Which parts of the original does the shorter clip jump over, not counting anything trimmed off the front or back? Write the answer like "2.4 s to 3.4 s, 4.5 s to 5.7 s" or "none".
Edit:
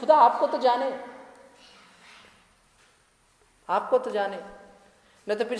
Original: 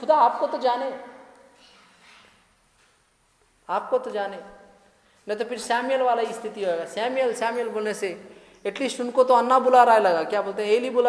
none